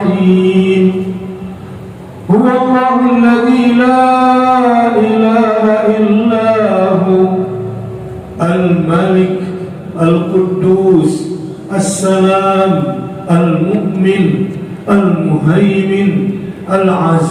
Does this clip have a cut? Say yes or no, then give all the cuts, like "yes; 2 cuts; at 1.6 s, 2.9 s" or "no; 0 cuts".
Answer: no; 0 cuts